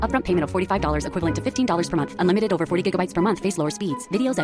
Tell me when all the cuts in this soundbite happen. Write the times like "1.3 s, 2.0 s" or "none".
none

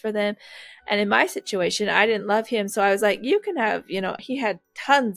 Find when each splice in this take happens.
4.2 s

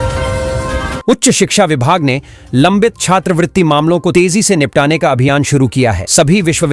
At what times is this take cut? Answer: 1.0 s

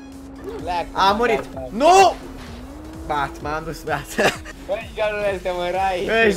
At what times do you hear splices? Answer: 4.5 s

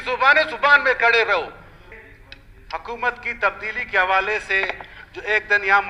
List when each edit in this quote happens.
1.9 s

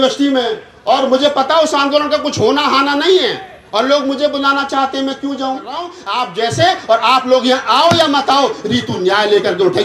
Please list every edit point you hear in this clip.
6.0 s

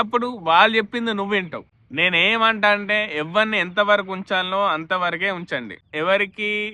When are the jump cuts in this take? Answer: none

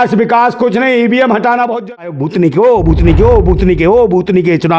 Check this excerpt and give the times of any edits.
1.9 s

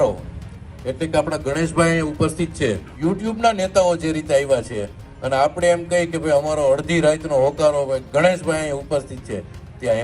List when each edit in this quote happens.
2.9 s

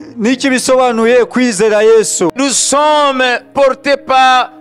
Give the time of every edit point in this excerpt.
2.3 s

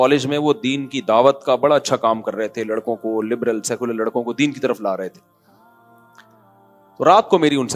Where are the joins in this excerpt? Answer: 5.2 s, 6.6 s

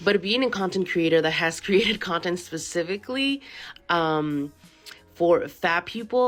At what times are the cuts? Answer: none

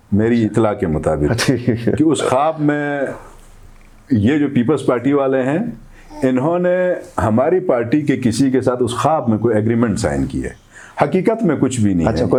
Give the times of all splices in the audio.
none

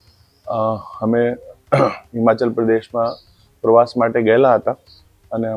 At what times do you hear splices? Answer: none

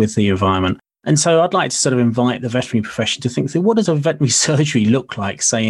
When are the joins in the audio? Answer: 0.9 s, 3.8 s

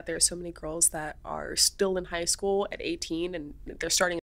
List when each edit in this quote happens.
none

